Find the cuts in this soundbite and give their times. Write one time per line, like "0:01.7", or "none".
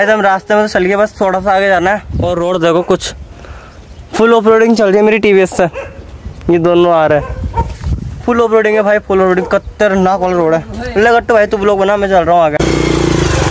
none